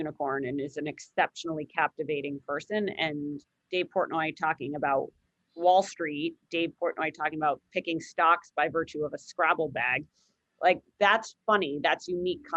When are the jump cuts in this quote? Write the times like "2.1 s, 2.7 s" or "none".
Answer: none